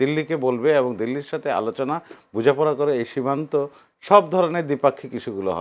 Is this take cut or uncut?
uncut